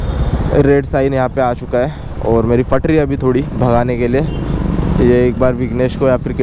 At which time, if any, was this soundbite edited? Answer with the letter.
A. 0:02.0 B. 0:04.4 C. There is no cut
C